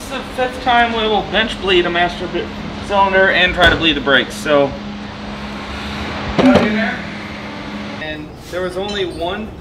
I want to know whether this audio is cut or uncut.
cut